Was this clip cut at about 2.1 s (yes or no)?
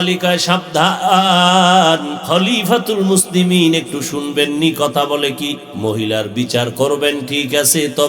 yes